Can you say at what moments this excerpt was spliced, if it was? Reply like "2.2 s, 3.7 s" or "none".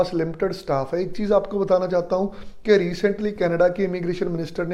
none